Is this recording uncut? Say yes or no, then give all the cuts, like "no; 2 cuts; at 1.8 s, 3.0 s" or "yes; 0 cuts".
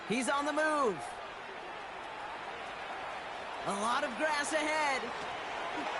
no; 1 cut; at 4.6 s